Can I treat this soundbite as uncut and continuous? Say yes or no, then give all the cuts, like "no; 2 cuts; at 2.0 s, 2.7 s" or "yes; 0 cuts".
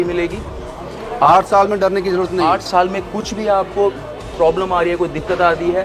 no; 1 cut; at 2.7 s